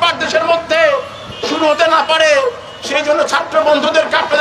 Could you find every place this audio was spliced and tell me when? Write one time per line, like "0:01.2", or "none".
none